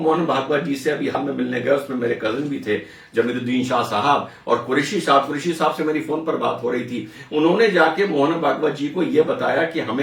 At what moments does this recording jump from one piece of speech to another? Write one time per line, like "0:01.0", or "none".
0:01.1

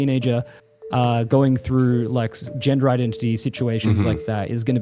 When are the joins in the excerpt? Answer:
none

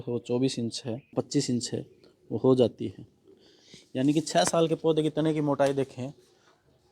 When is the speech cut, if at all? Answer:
0:01.1

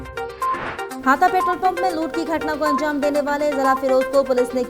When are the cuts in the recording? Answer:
0:00.9

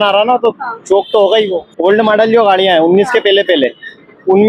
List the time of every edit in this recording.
0:01.6

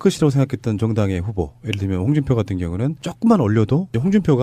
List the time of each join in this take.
0:01.5

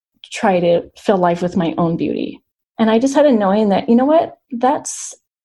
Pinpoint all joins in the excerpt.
0:02.6

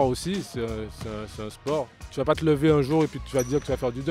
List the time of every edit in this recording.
0:02.0

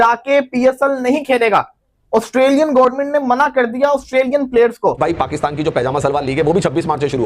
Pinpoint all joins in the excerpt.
0:05.0

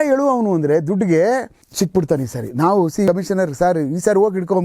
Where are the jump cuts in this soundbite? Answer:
0:01.6
0:03.1

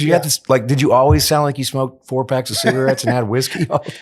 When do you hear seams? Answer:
none

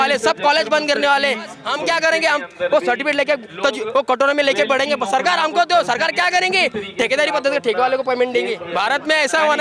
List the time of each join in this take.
0:01.6
0:08.6

